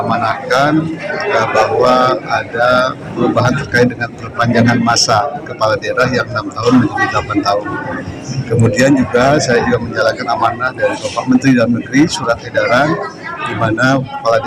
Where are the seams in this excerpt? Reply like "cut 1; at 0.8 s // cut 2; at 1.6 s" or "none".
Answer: none